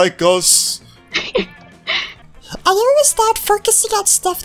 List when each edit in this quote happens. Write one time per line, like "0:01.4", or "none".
0:02.1